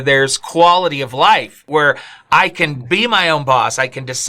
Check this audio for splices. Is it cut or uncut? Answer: cut